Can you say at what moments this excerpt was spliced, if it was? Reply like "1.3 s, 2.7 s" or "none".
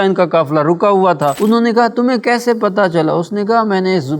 1.4 s